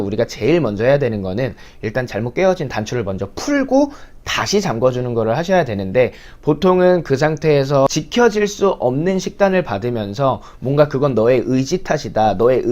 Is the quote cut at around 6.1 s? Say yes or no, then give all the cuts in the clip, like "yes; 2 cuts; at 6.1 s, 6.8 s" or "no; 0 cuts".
no; 1 cut; at 7.6 s